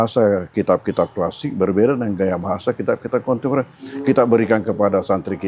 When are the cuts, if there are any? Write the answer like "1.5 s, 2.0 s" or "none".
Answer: none